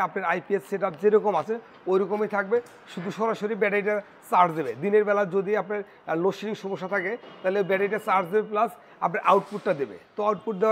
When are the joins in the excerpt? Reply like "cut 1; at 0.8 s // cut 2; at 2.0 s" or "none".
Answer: none